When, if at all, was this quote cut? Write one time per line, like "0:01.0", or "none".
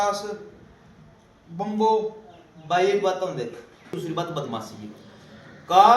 0:04.0